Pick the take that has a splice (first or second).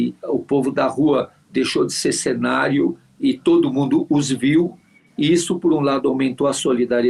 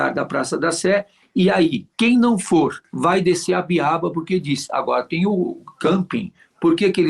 second